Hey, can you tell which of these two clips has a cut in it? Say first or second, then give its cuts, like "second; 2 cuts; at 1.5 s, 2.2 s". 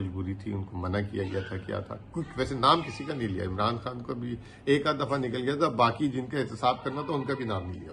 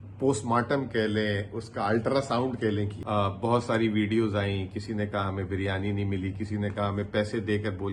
second; 1 cut; at 3.0 s